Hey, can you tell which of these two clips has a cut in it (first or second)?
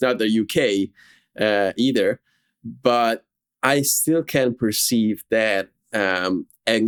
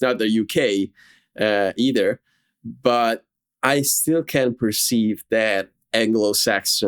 second